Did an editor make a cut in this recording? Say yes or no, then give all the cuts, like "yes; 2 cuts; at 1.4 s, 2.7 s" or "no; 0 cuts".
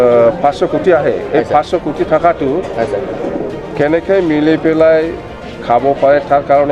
no; 0 cuts